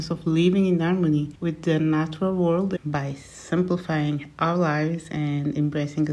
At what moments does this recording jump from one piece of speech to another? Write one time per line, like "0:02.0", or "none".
0:01.3
0:02.7